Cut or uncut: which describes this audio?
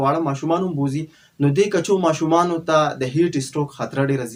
uncut